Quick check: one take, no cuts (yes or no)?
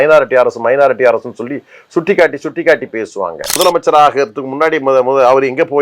no